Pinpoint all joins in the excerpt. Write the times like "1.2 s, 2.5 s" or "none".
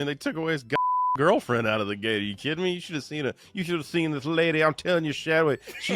none